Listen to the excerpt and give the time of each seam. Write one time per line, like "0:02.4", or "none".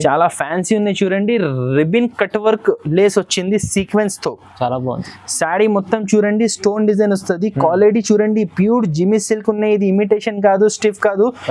none